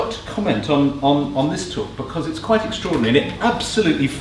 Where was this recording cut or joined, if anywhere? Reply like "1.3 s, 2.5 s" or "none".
none